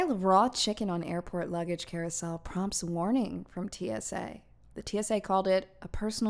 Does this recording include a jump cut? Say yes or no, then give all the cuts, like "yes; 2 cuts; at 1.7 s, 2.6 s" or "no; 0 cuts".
no; 0 cuts